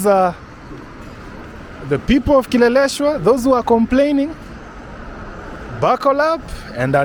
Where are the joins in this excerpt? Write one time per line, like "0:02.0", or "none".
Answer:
none